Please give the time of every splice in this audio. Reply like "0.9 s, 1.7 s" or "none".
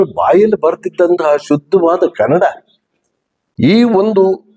3.4 s